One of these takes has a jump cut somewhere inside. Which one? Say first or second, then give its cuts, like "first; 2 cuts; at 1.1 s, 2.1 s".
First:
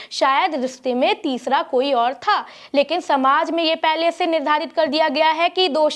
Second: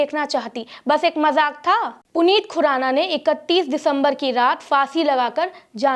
second; 1 cut; at 2.0 s